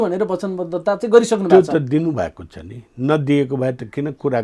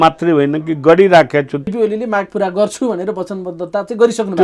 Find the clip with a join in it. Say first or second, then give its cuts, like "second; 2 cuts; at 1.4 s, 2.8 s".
second; 1 cut; at 1.7 s